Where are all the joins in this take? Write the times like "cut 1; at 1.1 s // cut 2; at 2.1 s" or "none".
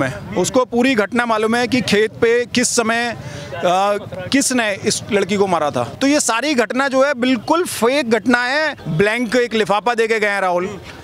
cut 1; at 5.9 s // cut 2; at 8.8 s